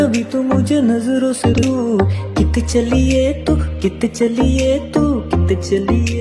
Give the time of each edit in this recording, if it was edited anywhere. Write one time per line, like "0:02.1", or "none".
none